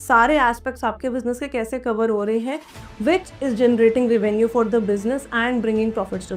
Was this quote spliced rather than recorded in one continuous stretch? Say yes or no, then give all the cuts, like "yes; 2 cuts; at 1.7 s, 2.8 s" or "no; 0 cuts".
no; 0 cuts